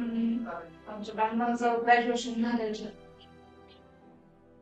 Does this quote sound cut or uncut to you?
uncut